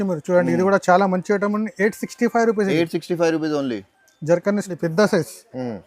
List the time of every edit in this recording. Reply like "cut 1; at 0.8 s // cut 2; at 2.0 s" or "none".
cut 1; at 4.7 s